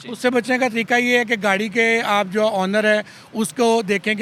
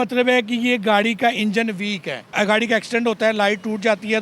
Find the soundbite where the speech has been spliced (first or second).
second